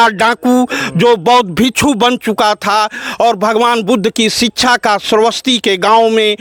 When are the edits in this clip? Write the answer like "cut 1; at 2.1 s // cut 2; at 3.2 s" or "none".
none

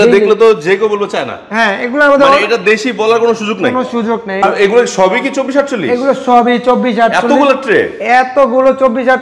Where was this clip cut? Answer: cut 1; at 4.4 s

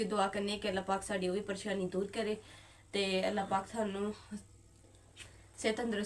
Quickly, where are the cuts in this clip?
none

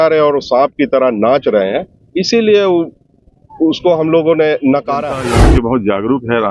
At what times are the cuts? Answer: cut 1; at 5.2 s

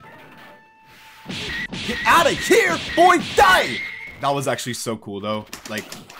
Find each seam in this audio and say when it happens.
none

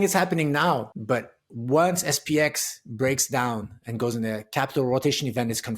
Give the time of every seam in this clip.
cut 1; at 0.9 s

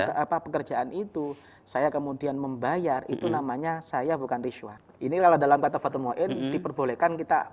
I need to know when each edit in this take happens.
cut 1; at 4.7 s

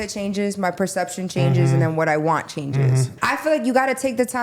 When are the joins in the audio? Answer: cut 1; at 3.1 s

